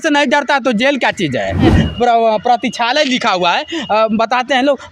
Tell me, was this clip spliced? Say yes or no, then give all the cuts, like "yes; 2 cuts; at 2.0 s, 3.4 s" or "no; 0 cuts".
yes; 1 cut; at 1.7 s